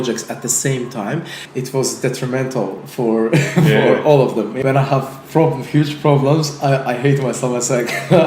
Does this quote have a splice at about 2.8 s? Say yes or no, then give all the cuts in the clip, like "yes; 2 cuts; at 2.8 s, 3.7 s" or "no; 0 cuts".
no; 2 cuts; at 1.4 s, 4.5 s